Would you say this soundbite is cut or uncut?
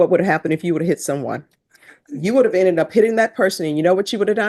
uncut